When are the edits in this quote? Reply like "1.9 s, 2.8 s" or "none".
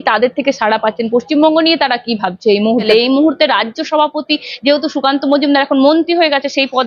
2.8 s